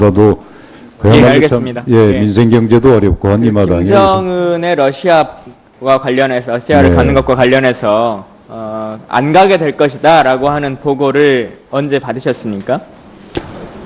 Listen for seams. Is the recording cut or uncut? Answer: uncut